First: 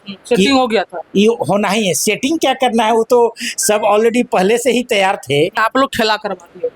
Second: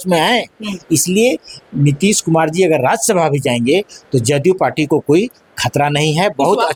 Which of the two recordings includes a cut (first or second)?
first